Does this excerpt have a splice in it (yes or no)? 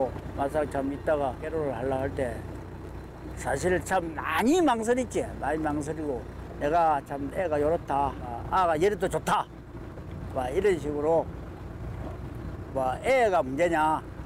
yes